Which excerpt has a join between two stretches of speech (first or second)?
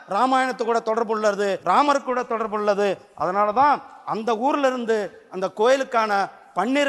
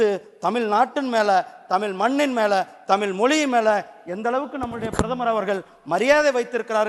first